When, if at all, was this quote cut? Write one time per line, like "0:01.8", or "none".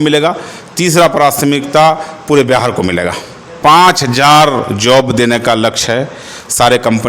0:03.5